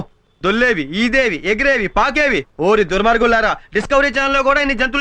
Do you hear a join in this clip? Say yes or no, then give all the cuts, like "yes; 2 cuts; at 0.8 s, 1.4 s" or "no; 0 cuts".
no; 0 cuts